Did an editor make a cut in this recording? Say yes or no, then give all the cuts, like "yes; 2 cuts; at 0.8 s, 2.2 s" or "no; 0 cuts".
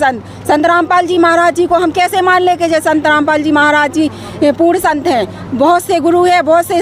no; 0 cuts